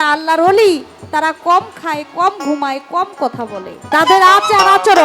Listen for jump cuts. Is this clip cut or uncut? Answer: cut